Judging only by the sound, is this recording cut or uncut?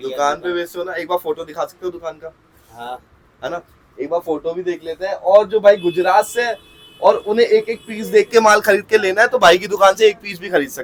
uncut